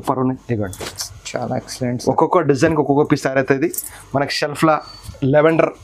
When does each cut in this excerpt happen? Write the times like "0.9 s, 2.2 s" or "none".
none